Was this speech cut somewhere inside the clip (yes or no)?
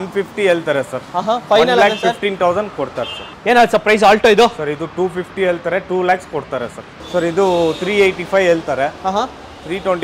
yes